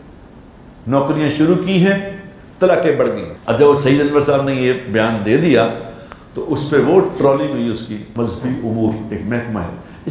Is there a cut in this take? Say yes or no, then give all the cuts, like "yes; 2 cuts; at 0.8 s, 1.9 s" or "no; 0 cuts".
yes; 2 cuts; at 3.3 s, 8.1 s